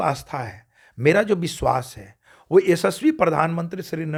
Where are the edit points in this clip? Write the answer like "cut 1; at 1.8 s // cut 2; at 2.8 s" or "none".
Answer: none